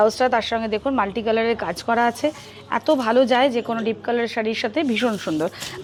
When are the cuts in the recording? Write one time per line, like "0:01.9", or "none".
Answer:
none

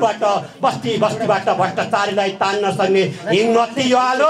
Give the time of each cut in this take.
none

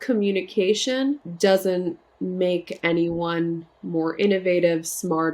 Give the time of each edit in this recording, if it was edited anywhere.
0:01.3
0:02.1

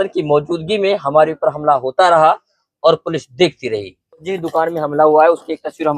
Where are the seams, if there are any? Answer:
0:04.3

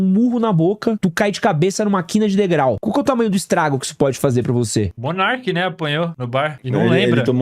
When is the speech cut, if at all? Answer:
0:01.0
0:02.8
0:05.0
0:06.4

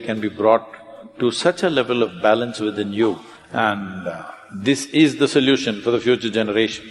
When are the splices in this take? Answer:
0:03.3

